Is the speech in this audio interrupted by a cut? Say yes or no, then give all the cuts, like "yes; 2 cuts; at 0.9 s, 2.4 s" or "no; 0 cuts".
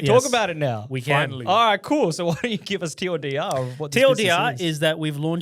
no; 0 cuts